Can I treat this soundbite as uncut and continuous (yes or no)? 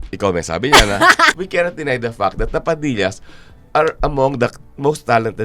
no